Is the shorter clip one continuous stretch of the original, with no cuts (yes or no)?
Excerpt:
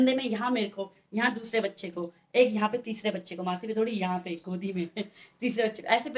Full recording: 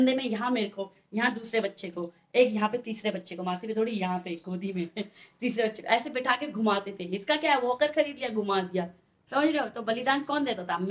yes